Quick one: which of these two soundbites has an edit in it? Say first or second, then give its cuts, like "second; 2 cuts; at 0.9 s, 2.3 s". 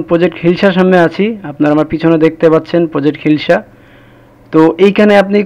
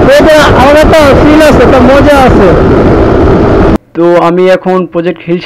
second; 1 cut; at 3.9 s